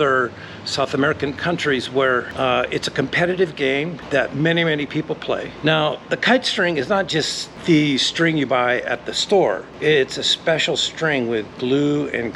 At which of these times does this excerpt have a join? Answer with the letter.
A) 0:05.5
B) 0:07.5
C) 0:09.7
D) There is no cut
A